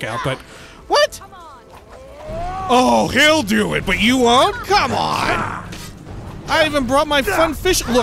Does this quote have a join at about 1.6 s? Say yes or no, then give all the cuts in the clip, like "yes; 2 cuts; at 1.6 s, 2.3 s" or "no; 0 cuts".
no; 1 cut; at 6.4 s